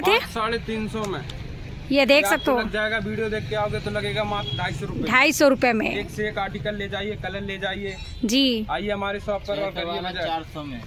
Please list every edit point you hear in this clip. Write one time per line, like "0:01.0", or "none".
none